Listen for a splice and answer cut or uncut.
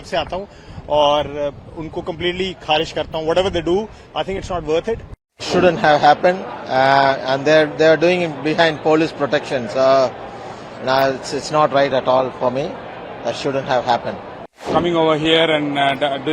cut